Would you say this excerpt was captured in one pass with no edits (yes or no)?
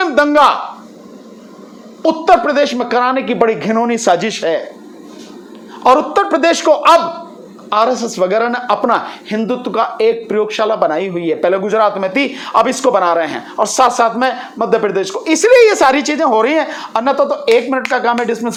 yes